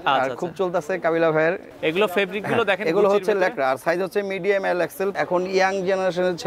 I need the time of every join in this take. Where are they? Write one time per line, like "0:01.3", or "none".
0:01.7
0:05.1